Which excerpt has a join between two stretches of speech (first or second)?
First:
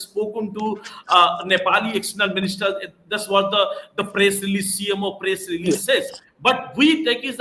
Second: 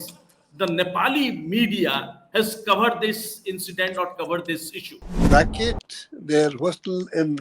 second